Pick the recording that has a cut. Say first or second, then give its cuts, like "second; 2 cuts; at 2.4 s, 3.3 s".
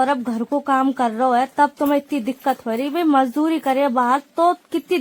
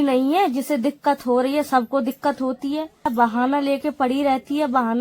second; 1 cut; at 3.1 s